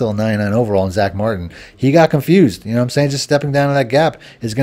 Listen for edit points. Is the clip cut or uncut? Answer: uncut